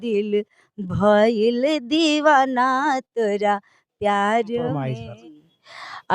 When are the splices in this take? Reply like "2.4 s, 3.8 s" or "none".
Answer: 4.9 s